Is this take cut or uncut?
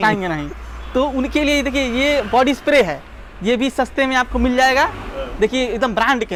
uncut